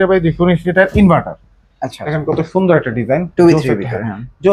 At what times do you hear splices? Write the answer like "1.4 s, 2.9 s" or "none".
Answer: none